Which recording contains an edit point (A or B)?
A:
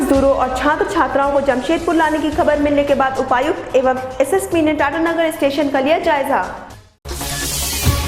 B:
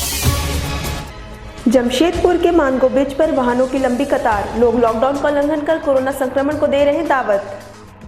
B